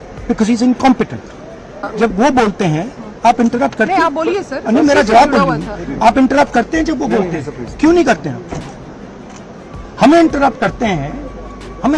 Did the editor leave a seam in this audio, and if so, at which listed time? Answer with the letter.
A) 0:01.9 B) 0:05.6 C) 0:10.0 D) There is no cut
A